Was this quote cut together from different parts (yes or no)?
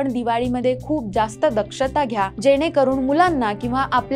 yes